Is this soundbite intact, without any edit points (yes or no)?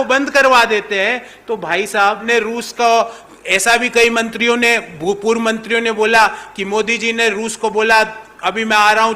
no